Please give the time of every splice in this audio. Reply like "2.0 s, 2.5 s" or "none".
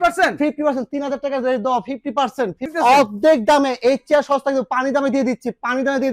2.7 s